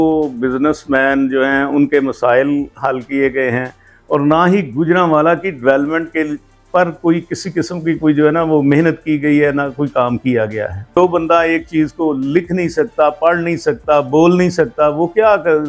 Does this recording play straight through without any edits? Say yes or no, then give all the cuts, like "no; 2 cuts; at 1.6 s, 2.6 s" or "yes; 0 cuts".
no; 1 cut; at 11.0 s